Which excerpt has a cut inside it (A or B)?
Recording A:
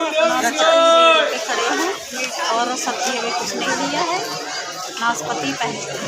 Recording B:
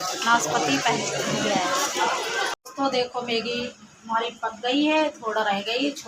B